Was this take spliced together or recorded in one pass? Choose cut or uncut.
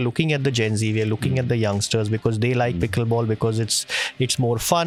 uncut